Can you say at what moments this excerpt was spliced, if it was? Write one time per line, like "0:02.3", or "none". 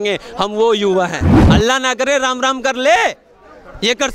0:01.4

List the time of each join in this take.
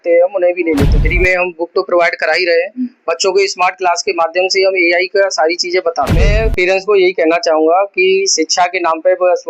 0:01.0
0:06.3

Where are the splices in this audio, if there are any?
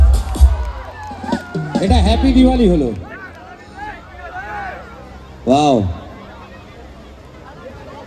none

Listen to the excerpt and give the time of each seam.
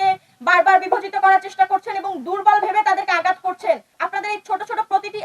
0:03.9

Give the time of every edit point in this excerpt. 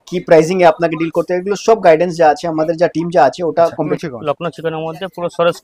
0:03.8

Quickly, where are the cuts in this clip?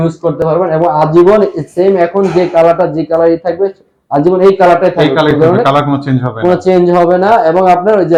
none

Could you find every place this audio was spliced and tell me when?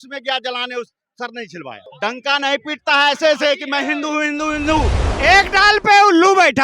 0:01.9
0:05.0

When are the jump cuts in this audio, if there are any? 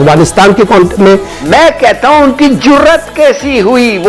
0:01.3

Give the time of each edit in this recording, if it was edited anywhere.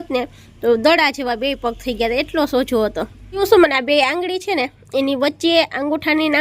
0:03.4

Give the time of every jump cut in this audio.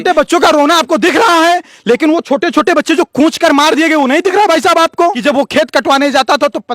0:05.2

